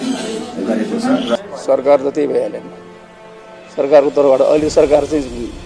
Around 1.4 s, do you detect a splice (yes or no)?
yes